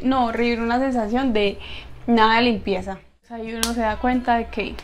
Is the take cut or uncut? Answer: cut